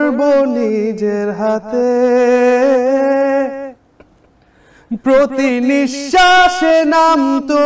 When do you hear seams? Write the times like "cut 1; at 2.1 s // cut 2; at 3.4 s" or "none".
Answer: none